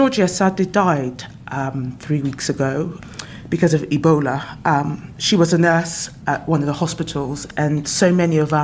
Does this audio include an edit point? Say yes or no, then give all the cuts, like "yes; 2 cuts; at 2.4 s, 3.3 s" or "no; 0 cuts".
yes; 3 cuts; at 3.0 s, 6.1 s, 7.4 s